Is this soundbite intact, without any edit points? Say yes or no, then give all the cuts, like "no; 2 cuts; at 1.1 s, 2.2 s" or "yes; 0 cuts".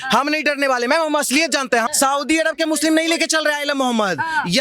no; 1 cut; at 1.9 s